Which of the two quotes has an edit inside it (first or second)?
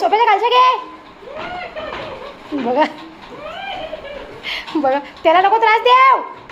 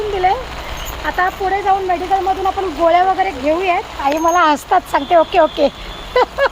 second